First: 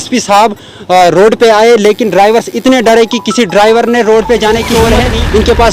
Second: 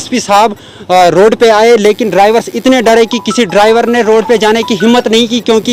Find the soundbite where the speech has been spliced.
first; 1 cut; at 4.7 s

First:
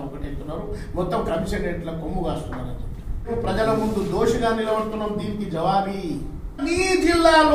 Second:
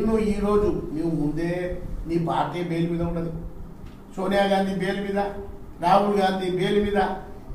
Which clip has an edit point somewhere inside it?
first; 2 cuts; at 3.3 s, 6.7 s

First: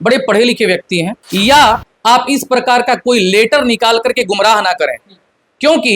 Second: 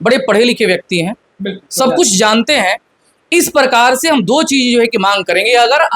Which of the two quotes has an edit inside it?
first; 1 cut; at 1.2 s

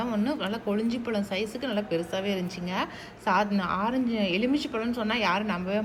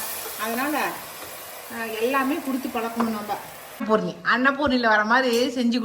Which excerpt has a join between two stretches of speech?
second; 1 cut; at 3.8 s

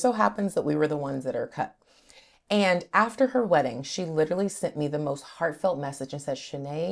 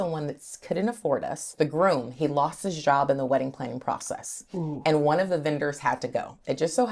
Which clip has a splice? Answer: second; 1 cut; at 1.5 s

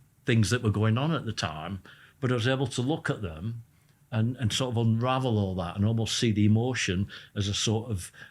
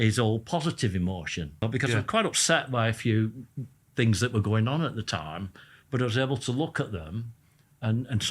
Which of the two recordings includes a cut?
second; 1 cut; at 1.6 s

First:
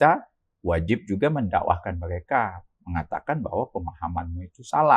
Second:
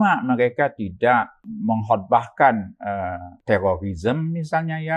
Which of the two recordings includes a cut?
second; 2 cuts; at 1.5 s, 3.3 s

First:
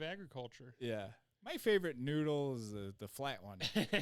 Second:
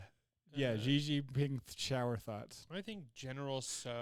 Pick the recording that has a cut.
second; 1 cut; at 2.6 s

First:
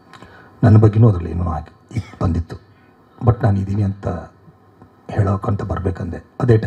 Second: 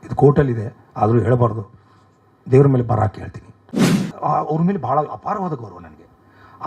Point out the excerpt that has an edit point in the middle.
second; 1 cut; at 4.1 s

